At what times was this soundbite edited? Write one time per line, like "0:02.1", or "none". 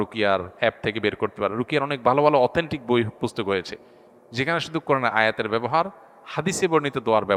none